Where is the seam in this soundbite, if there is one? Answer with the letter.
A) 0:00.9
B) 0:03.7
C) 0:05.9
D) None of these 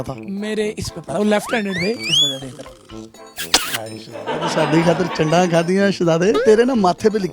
A